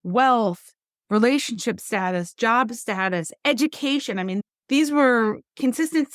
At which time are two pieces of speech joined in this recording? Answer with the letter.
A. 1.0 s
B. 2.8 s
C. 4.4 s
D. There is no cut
C